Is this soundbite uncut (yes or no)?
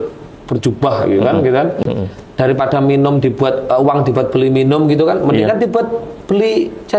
no